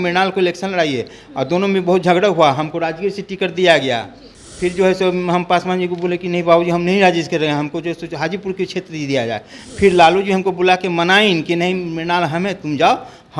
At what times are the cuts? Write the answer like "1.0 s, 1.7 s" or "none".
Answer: none